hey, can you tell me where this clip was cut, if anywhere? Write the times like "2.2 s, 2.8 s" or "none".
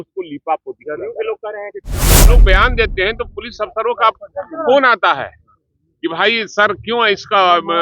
2.2 s

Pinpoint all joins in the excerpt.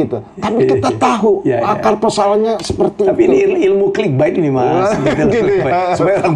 none

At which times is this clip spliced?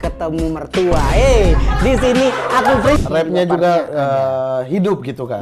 3.0 s

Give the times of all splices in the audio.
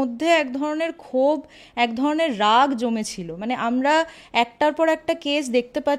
none

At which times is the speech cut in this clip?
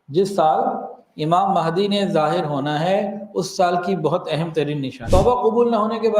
4.9 s

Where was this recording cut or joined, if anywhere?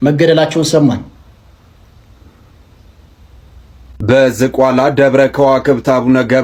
none

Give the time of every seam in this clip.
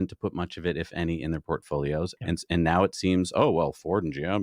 2.1 s

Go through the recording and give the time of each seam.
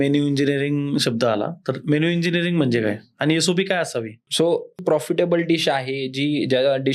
4.8 s

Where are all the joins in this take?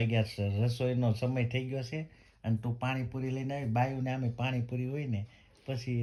none

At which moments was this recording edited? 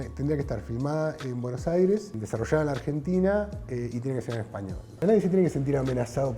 2.2 s, 5.0 s

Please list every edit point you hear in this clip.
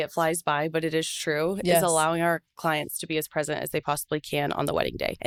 none

